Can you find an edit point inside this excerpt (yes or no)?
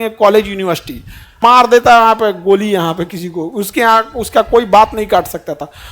yes